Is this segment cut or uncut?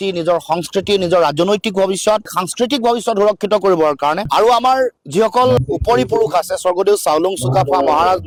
uncut